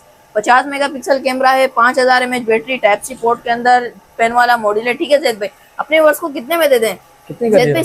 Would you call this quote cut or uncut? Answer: uncut